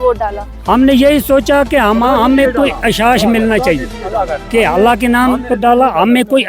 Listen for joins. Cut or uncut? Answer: uncut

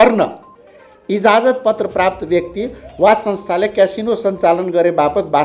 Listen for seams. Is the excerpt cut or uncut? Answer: uncut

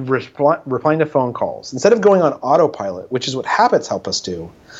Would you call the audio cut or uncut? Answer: uncut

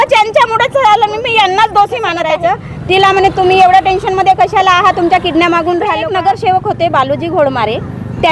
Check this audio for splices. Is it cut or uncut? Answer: cut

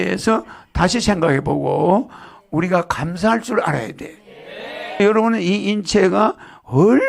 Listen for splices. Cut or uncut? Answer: cut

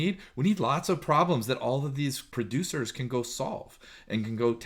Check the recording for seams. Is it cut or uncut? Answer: uncut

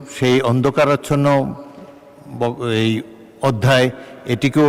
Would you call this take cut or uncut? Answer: uncut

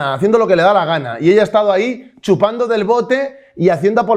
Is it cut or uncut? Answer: uncut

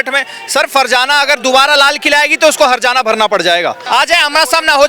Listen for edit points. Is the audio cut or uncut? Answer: cut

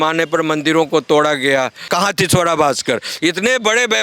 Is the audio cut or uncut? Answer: cut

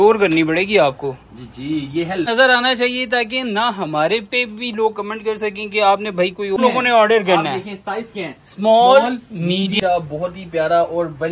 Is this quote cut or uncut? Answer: cut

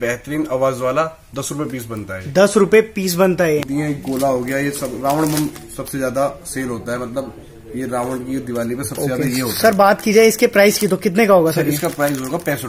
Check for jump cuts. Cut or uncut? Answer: cut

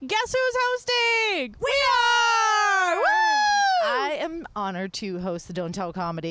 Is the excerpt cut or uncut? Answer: cut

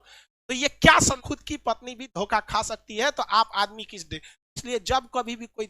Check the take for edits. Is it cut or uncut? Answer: cut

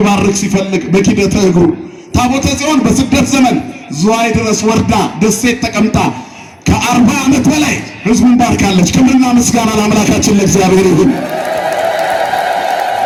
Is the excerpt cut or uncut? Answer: uncut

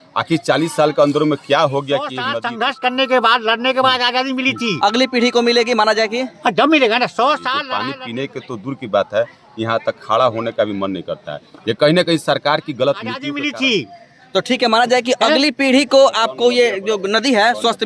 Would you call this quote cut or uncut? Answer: cut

